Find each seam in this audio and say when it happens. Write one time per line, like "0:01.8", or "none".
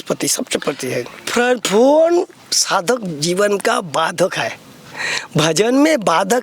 0:01.3